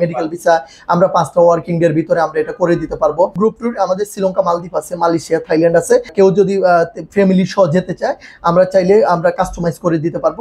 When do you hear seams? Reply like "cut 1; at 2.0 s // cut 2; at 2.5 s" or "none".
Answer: cut 1; at 3.3 s // cut 2; at 6.1 s